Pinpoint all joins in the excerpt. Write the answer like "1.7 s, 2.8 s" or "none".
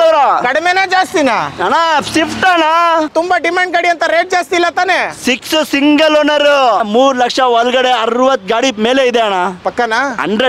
3.1 s, 6.9 s